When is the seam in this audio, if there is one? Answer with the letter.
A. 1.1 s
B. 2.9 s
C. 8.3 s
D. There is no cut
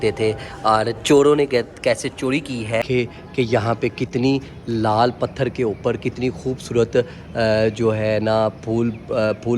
B